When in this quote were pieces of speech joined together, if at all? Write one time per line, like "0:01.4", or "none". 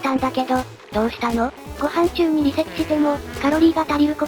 none